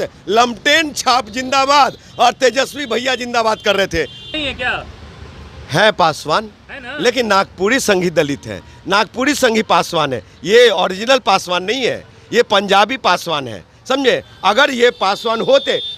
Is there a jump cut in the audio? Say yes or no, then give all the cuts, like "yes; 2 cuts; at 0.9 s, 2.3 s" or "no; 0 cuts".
yes; 1 cut; at 4.3 s